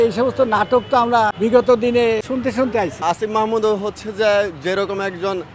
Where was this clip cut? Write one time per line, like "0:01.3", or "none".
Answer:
0:01.3
0:02.6